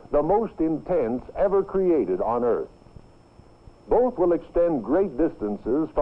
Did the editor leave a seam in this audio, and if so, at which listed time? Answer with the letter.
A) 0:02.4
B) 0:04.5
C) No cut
A